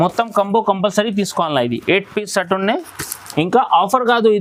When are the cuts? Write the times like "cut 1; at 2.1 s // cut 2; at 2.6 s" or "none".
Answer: none